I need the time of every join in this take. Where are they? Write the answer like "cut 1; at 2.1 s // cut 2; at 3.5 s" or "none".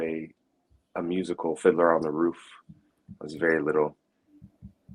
none